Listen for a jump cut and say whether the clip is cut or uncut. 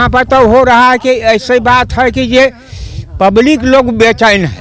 uncut